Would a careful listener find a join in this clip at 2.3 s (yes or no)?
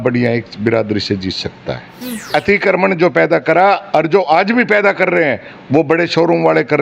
yes